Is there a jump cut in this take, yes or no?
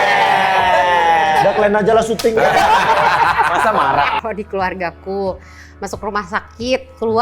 yes